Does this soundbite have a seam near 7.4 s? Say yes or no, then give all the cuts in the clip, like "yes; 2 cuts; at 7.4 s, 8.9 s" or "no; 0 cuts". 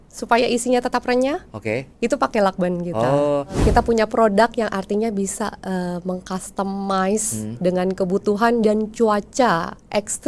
no; 1 cut; at 3.6 s